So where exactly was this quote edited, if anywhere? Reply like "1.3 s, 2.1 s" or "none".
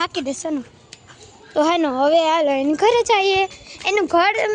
none